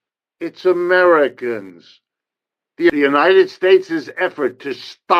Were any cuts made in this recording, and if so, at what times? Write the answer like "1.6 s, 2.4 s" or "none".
2.9 s